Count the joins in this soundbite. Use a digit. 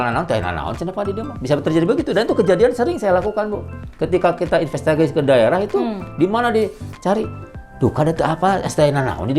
0